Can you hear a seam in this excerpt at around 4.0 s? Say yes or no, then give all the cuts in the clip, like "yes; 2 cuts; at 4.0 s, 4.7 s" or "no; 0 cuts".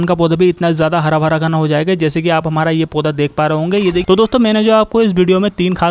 yes; 1 cut; at 4.0 s